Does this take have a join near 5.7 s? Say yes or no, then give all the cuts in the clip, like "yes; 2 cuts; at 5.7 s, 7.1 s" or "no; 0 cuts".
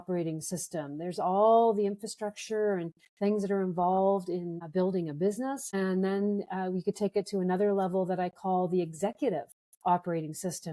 yes; 2 cuts; at 4.6 s, 5.7 s